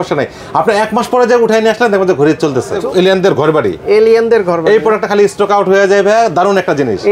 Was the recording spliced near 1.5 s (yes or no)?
no